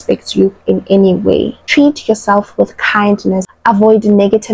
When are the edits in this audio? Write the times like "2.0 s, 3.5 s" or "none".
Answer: 1.6 s, 3.5 s